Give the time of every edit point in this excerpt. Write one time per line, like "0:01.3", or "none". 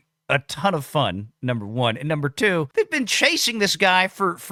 none